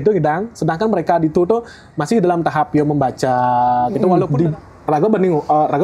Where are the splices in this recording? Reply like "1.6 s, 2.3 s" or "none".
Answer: 4.3 s